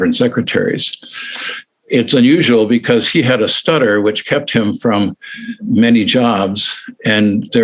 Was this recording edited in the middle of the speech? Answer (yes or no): yes